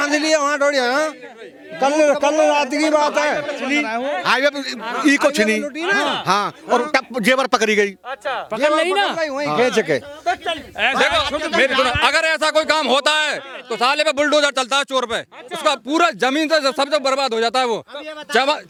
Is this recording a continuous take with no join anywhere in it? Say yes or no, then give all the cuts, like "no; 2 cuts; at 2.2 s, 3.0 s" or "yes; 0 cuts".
yes; 0 cuts